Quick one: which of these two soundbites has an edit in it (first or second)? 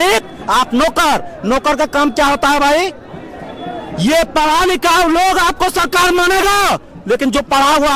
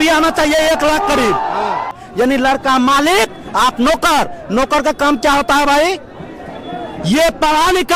second